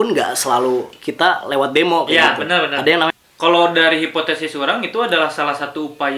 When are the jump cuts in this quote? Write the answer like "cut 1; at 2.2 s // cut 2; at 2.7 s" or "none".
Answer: cut 1; at 3.2 s